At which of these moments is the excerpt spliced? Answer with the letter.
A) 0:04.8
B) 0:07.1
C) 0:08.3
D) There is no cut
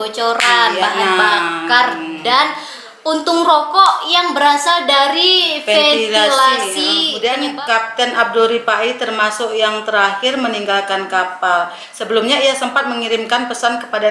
B